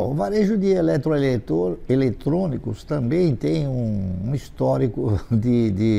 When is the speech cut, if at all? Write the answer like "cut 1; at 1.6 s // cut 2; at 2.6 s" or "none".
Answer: none